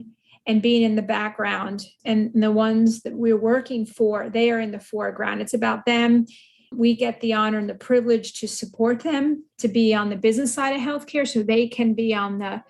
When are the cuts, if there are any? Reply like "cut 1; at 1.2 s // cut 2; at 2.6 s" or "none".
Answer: cut 1; at 9.5 s